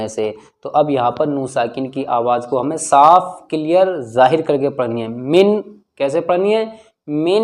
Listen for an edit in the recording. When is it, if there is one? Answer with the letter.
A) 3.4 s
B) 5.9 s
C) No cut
C